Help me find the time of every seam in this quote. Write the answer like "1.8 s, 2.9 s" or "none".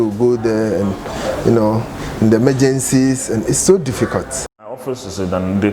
4.6 s